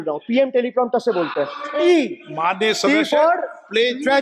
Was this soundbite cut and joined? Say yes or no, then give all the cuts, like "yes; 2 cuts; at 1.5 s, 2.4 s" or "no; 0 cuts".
yes; 1 cut; at 1.8 s